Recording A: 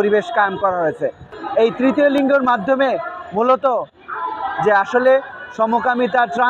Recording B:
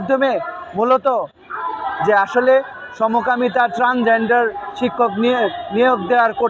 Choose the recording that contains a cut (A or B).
A